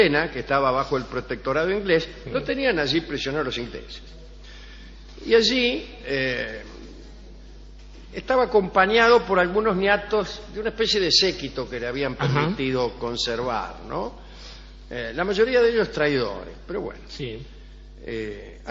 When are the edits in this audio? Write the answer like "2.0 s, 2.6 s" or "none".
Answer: 9.2 s